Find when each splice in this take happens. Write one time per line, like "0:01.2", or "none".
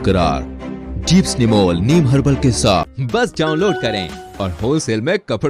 0:02.9